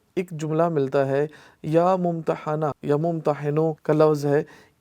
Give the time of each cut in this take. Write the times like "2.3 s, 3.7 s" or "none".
2.8 s, 3.8 s